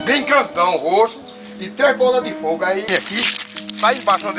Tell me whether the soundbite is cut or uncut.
cut